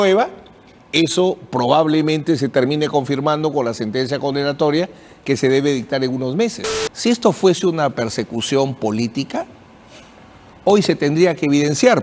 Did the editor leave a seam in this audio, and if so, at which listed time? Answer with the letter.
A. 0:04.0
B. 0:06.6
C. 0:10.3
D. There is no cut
B